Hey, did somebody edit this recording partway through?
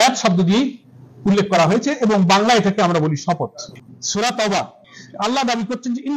yes; 1 cut; at 3.6 s

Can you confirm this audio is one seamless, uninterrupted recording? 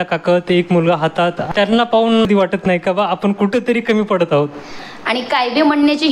no; 2 cuts; at 1.4 s, 4.8 s

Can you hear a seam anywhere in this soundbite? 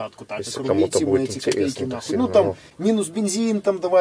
no; 0 cuts

